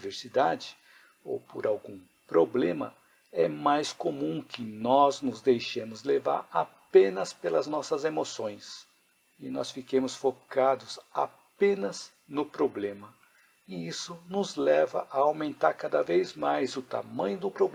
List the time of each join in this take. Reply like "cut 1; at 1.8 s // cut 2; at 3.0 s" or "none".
none